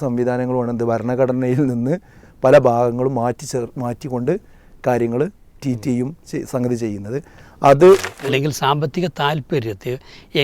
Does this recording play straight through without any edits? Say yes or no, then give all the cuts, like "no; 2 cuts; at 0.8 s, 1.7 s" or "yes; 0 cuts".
no; 1 cut; at 8.1 s